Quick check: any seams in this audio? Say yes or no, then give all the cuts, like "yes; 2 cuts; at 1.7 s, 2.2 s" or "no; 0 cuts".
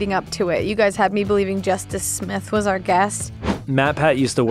yes; 1 cut; at 3.6 s